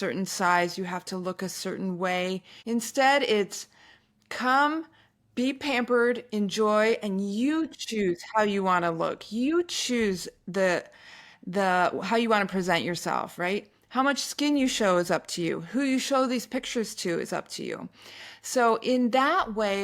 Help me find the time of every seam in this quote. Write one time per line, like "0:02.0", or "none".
0:02.5